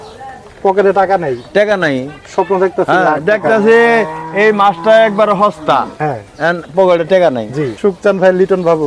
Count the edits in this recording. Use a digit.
1